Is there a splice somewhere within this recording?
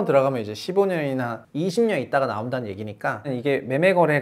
yes; 1 cut; at 3.3 s

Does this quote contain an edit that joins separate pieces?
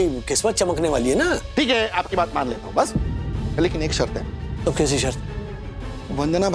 yes; 2 cuts; at 1.4 s, 4.4 s

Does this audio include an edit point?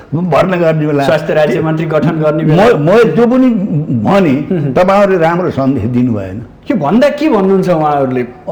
no; 0 cuts

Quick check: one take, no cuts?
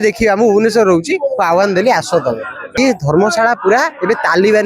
no; 1 cut; at 2.6 s

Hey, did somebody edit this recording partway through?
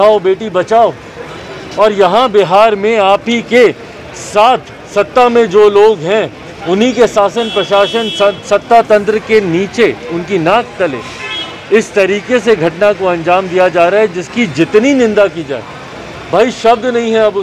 no; 0 cuts

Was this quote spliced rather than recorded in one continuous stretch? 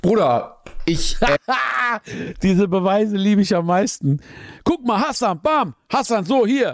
no; 0 cuts

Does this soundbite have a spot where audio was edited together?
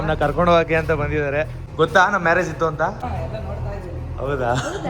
yes; 2 cuts; at 1.6 s, 3.1 s

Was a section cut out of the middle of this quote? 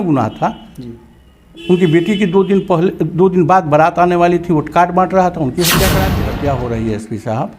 yes; 1 cut; at 6.2 s

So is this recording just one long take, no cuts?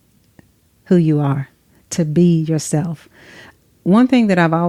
yes; 0 cuts

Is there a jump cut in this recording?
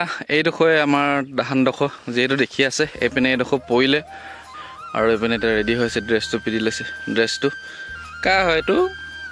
yes; 1 cut; at 4.5 s

